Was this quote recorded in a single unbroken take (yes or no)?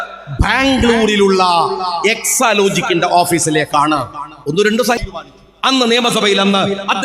no